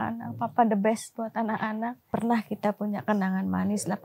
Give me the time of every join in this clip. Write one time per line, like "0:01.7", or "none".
0:02.1

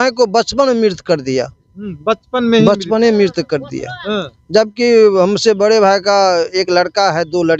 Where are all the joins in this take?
none

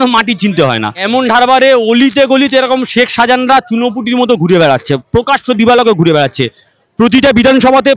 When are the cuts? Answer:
0:01.0

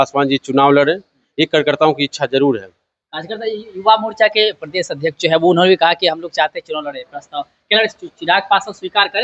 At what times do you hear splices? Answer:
none

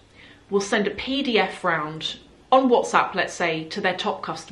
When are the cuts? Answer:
none

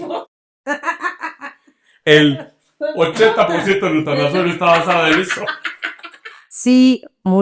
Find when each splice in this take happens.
0:06.5

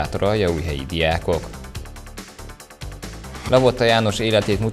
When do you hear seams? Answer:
none

